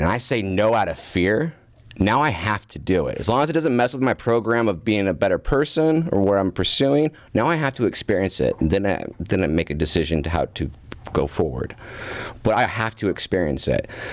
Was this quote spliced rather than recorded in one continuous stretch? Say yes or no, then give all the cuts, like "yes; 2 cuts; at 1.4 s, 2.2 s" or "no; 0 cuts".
no; 0 cuts